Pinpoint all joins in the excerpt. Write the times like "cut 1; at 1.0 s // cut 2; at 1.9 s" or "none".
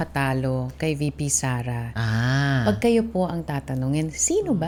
none